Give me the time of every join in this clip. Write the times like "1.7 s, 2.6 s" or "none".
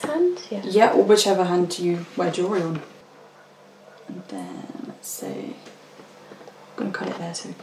2.9 s